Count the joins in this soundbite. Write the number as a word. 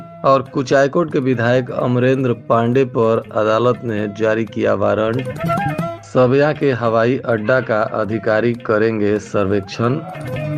zero